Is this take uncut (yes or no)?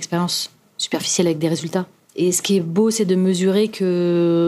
no